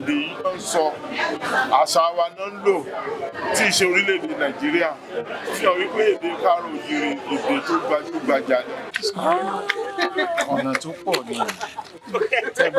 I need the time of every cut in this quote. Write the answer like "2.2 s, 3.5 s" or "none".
8.9 s